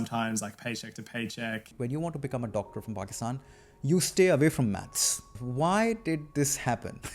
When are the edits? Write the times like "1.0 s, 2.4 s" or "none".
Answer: 1.7 s, 5.4 s